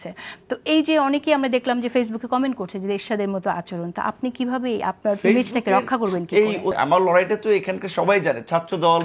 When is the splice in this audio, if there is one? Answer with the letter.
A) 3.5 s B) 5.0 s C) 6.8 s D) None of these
C